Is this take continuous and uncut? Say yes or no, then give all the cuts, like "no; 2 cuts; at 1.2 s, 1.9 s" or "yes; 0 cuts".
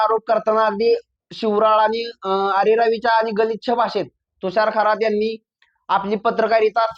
yes; 0 cuts